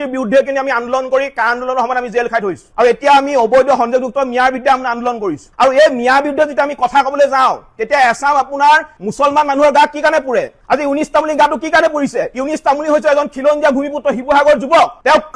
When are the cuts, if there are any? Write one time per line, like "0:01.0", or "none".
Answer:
none